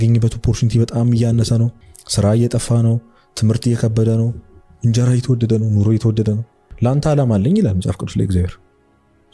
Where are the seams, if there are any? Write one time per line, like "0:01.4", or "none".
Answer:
0:01.8
0:06.7